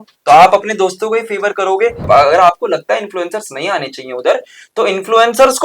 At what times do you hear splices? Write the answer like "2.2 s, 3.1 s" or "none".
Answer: 2.0 s